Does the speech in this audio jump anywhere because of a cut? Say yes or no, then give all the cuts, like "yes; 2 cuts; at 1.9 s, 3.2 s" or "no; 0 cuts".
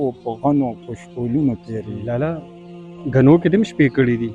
yes; 1 cut; at 1.9 s